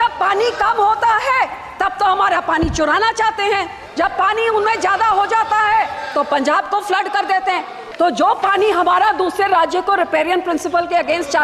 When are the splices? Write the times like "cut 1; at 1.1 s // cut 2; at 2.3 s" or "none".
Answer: cut 1; at 7.8 s